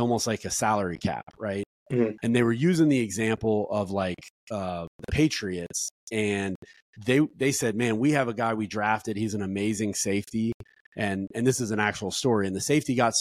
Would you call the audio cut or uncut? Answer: uncut